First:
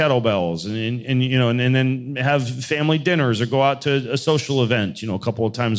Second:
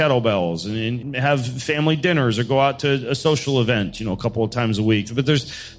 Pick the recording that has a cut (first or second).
second